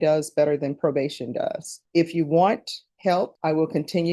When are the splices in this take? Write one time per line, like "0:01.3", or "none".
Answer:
0:01.7
0:03.2

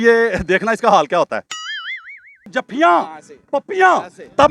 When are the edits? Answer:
0:02.5

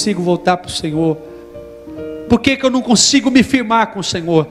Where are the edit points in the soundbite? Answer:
none

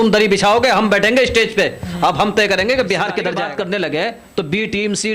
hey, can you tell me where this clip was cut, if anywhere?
0:03.3

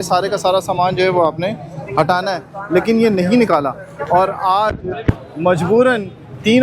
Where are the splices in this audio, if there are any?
none

